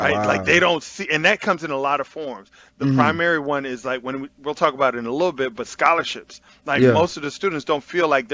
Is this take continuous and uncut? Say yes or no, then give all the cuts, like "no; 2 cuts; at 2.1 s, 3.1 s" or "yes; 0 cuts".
yes; 0 cuts